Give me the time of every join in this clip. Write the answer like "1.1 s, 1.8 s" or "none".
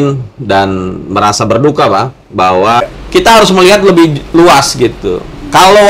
3.0 s